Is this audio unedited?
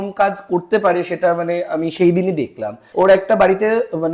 no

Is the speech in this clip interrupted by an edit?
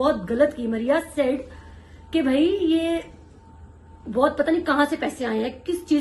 no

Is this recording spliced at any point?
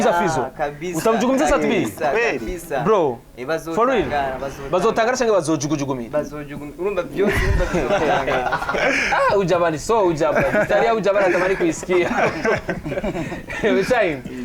no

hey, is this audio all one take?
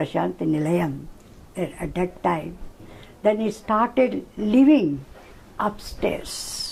yes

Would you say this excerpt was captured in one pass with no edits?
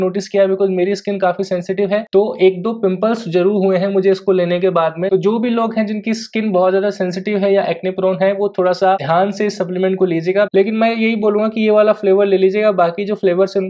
no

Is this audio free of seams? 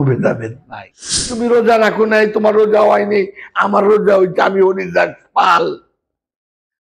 no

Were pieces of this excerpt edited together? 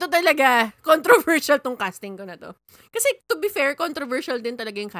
no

